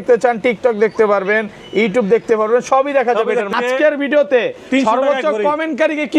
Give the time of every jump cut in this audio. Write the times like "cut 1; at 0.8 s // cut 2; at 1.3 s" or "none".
cut 1; at 3.5 s